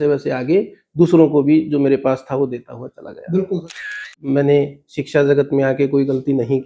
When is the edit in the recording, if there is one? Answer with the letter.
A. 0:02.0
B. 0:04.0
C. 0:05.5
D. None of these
B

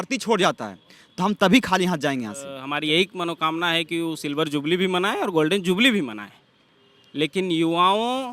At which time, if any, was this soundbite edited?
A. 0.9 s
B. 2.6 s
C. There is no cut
B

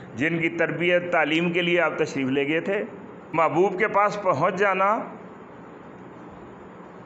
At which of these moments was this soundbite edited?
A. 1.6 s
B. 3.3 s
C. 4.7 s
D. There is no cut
B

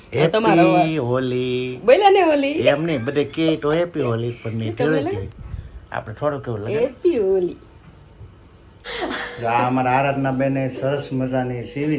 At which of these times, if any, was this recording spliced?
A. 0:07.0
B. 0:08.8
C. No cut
B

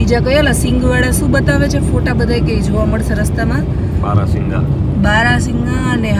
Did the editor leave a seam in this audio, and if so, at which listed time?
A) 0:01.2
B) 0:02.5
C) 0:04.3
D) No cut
D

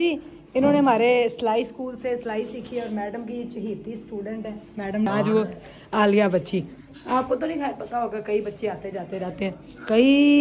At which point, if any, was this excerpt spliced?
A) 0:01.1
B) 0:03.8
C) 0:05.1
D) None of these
C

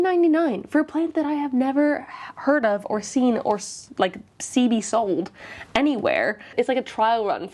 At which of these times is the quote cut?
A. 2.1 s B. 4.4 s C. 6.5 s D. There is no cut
C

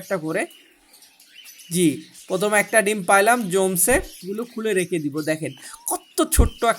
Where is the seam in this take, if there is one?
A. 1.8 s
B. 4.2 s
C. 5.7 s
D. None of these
B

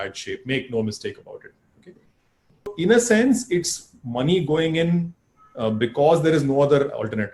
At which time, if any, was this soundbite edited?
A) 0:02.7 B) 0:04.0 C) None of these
A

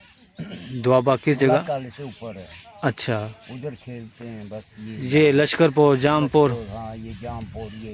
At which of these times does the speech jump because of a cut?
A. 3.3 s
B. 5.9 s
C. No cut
C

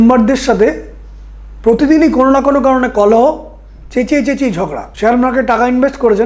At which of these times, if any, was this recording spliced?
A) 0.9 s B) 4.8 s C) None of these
B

